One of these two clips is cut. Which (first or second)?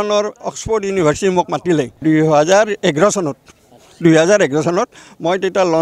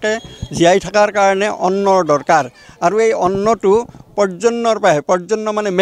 first